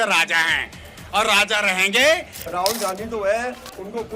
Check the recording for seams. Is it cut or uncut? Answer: cut